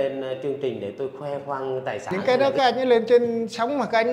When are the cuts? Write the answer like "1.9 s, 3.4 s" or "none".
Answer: 2.1 s